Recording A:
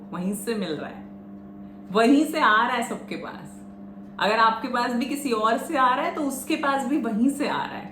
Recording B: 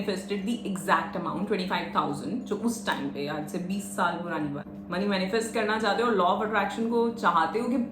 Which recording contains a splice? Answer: B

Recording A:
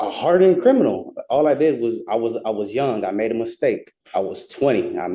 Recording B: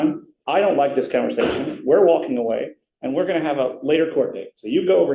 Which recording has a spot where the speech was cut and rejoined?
A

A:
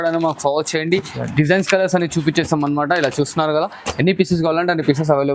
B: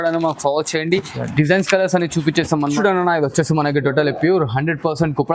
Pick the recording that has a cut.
B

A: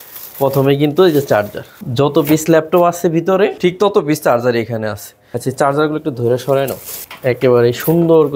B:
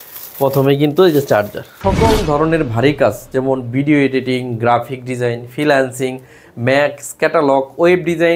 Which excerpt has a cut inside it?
B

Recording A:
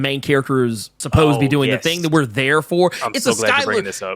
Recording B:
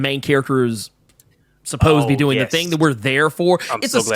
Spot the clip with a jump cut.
A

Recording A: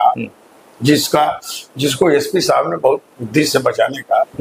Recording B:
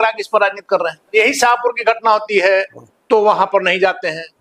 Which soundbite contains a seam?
B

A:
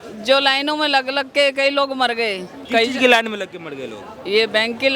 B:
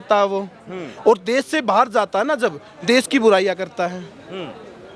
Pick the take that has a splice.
A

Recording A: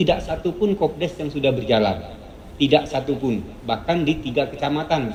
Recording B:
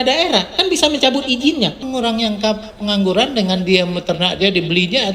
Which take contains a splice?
B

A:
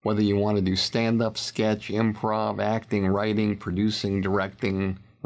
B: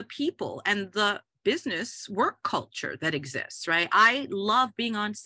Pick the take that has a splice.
B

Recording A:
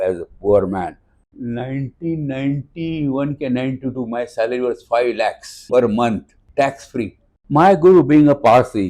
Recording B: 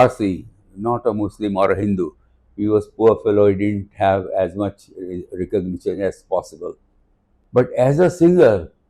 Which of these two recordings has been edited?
A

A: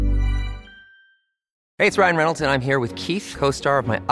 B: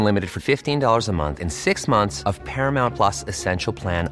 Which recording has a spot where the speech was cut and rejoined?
A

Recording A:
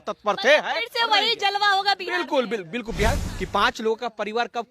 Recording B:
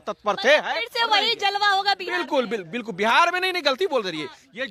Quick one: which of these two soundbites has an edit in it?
A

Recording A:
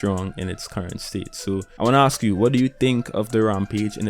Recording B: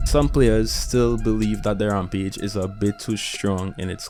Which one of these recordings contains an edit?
A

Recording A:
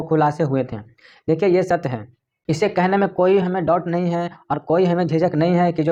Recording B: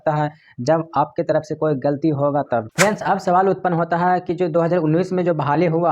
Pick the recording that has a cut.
B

